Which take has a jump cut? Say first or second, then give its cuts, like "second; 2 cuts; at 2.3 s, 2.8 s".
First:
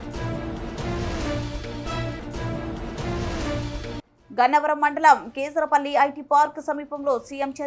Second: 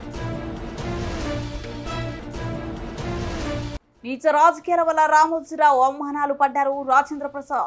second; 1 cut; at 3.7 s